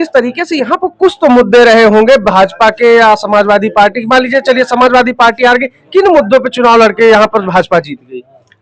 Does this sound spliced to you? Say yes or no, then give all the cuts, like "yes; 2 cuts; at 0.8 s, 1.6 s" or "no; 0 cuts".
no; 0 cuts